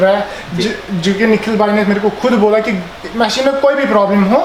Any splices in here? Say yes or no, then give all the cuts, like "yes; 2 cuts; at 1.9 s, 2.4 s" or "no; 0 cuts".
no; 0 cuts